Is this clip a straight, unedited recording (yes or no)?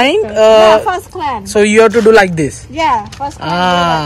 yes